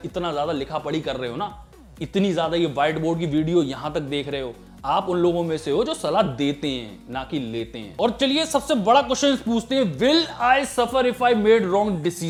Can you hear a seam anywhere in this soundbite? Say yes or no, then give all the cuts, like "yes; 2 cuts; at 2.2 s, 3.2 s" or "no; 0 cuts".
no; 0 cuts